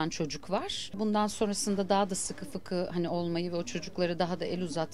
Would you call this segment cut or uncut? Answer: cut